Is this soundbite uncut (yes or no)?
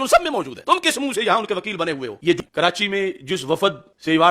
no